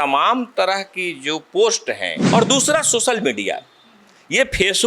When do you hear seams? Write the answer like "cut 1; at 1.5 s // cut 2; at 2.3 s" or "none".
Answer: cut 1; at 2.1 s